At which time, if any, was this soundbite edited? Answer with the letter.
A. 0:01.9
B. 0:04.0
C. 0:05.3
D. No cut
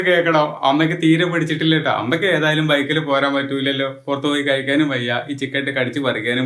D